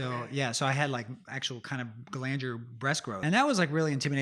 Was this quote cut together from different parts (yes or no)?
yes